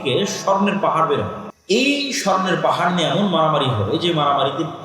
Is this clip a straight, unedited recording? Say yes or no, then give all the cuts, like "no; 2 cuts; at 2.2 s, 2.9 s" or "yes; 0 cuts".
no; 1 cut; at 1.5 s